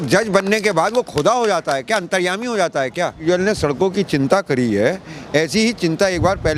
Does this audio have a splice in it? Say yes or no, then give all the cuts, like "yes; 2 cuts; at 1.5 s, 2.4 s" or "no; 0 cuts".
yes; 1 cut; at 3.2 s